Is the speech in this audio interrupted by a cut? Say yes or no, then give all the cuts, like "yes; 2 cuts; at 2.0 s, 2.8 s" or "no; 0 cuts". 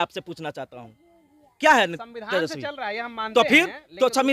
no; 0 cuts